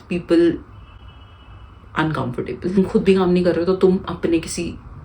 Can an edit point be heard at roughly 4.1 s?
no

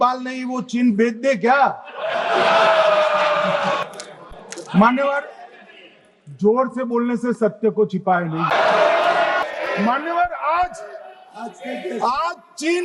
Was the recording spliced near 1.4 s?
no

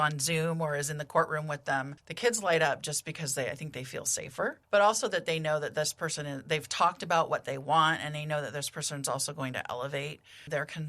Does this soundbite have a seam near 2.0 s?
yes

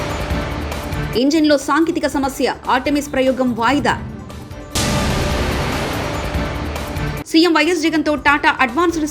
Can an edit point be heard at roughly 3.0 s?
no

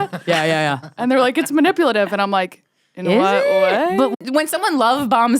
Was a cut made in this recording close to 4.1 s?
yes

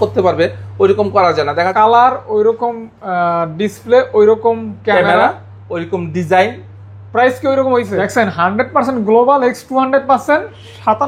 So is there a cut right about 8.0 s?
yes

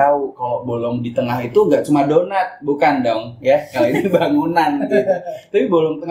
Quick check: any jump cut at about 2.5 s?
no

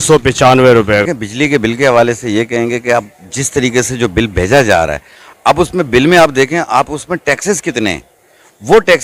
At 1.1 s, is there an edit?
yes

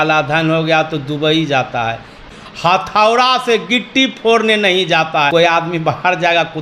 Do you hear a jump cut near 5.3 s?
yes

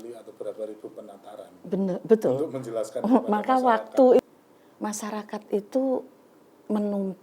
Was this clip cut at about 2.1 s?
no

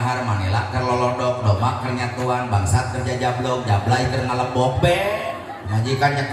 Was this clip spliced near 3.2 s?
no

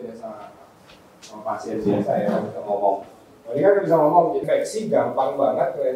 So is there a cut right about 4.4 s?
yes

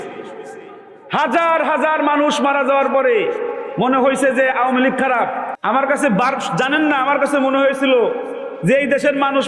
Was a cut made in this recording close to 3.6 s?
no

